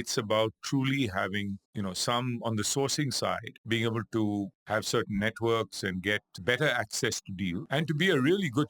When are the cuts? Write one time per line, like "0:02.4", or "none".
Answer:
0:01.6
0:03.5
0:04.6
0:06.3
0:07.6